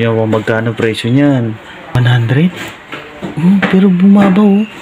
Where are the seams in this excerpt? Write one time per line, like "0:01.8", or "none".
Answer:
0:02.0